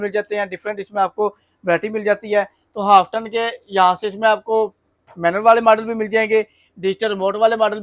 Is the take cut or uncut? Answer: uncut